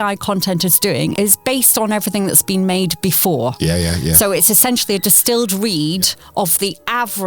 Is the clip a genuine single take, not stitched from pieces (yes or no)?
no